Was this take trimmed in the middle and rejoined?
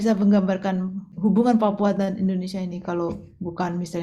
yes; 1 cut; at 1.1 s

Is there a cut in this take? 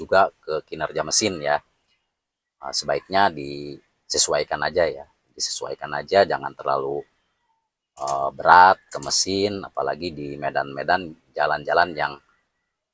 no; 0 cuts

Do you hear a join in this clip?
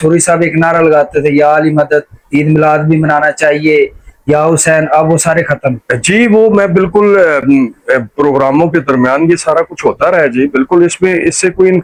no; 0 cuts

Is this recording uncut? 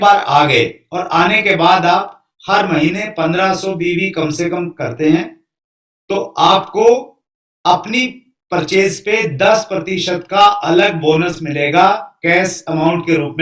yes; 0 cuts

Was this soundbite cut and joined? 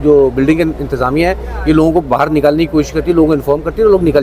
no; 0 cuts

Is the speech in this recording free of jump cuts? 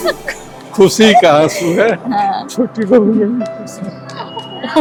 yes; 0 cuts

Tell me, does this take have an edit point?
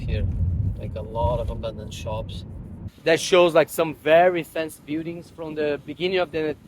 yes; 1 cut; at 2.9 s

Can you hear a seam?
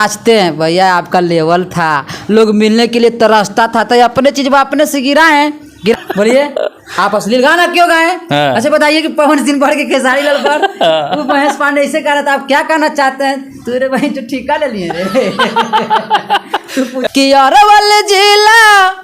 yes; 2 cuts; at 5.9 s, 17.0 s

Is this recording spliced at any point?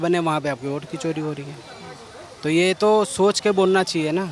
no; 0 cuts

